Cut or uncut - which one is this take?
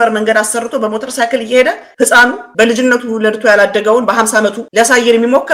cut